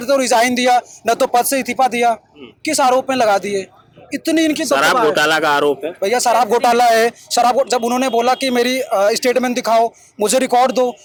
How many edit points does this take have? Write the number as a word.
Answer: zero